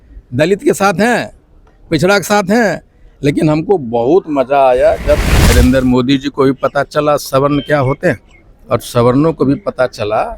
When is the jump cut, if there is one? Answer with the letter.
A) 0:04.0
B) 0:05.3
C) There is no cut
B